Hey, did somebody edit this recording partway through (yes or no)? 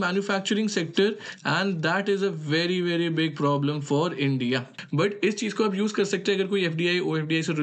yes